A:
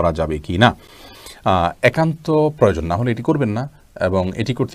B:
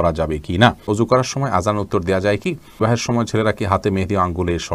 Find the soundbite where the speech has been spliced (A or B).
B